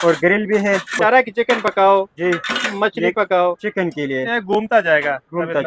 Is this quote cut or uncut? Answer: cut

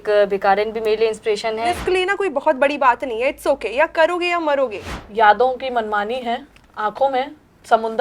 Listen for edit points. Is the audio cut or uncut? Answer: cut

